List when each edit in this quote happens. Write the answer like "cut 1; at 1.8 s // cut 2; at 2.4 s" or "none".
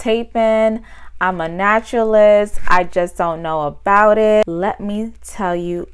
cut 1; at 4.4 s